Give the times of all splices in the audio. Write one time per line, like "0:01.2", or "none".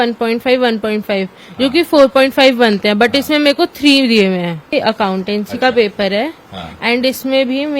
0:04.7